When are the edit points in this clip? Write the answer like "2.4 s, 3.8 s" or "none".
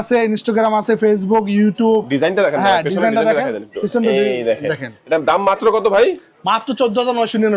none